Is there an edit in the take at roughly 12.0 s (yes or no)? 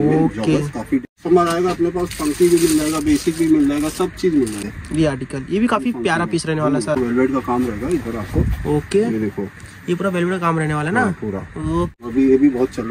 yes